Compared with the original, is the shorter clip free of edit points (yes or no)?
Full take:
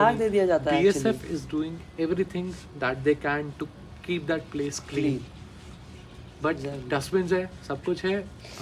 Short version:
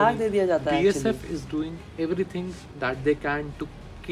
yes